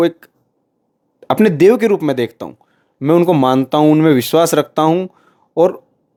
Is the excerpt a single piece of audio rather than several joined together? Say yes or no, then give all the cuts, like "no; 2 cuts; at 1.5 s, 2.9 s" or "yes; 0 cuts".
yes; 0 cuts